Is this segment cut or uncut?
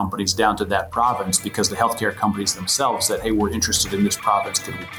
uncut